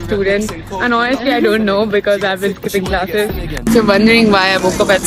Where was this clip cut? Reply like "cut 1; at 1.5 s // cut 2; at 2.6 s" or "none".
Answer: none